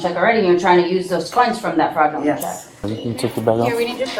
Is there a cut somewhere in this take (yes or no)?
yes